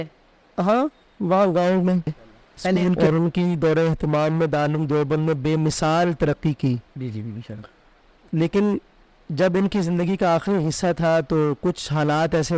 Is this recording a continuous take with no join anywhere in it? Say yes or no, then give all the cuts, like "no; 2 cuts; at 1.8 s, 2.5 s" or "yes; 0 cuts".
no; 1 cut; at 3.0 s